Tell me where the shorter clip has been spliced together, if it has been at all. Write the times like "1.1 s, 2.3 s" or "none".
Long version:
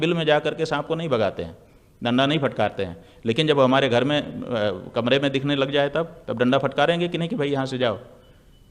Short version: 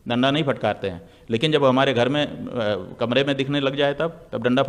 none